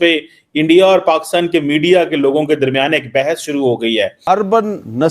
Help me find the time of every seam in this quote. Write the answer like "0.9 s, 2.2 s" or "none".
4.2 s